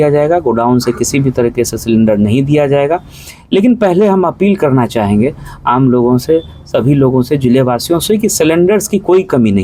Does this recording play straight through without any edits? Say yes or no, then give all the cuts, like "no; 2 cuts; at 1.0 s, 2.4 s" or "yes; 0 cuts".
yes; 0 cuts